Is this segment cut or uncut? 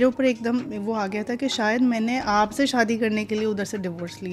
uncut